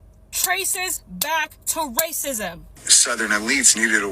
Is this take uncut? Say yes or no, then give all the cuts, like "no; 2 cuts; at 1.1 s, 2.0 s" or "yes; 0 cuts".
no; 1 cut; at 2.7 s